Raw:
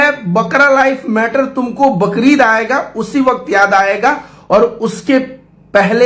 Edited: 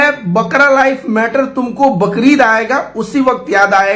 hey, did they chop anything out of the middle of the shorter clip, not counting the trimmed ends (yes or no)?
no